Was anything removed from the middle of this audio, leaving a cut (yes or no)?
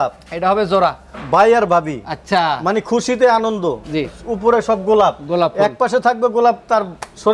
no